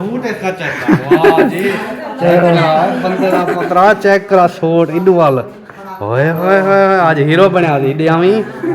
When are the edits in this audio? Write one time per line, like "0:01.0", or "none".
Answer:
none